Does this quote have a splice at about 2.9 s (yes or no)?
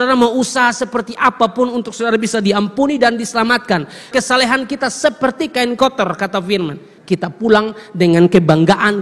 no